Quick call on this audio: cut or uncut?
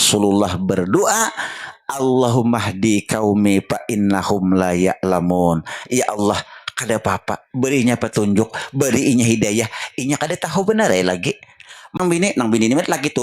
cut